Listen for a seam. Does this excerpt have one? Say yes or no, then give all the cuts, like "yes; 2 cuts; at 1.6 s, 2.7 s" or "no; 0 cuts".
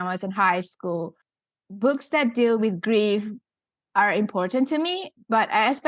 yes; 1 cut; at 1.5 s